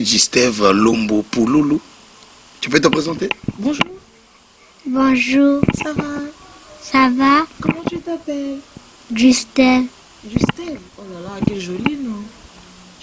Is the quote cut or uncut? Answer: uncut